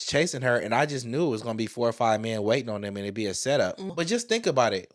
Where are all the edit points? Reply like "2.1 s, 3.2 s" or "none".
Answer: 3.9 s